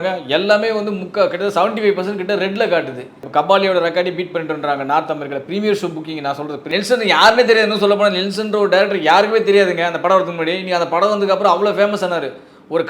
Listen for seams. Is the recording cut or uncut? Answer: cut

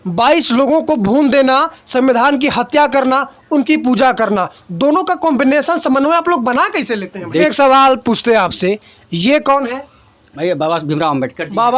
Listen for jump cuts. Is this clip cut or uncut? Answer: cut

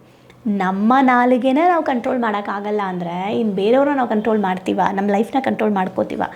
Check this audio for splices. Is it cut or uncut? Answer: uncut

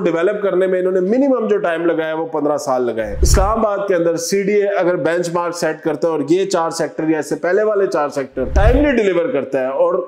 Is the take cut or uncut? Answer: cut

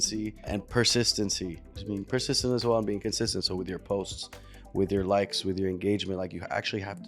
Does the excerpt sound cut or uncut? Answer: cut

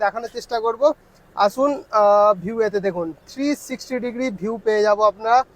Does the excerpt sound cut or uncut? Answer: uncut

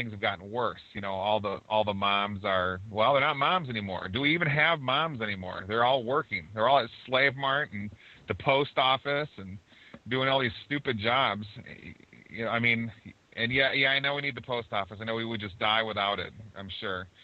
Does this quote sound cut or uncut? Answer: uncut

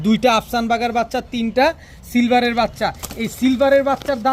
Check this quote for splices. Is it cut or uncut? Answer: uncut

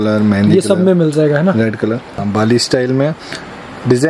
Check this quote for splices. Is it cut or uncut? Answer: cut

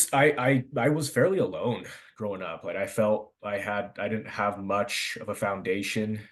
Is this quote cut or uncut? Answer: uncut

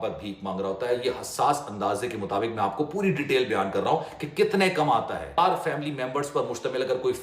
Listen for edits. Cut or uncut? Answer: cut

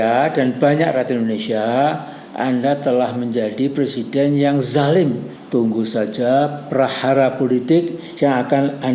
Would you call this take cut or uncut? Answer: cut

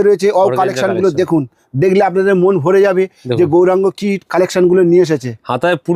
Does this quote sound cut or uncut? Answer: uncut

